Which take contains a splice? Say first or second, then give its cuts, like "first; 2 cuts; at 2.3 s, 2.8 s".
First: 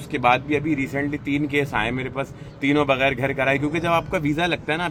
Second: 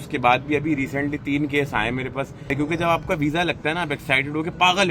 second; 1 cut; at 2.5 s